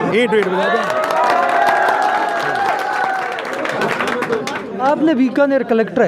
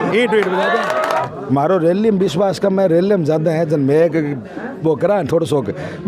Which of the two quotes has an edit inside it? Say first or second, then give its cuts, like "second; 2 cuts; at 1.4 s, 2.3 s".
second; 1 cut; at 1.2 s